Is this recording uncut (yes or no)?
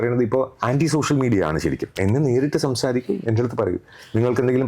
no